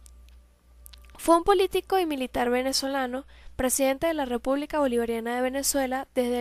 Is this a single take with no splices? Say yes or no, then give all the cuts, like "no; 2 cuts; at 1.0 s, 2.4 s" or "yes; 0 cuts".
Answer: yes; 0 cuts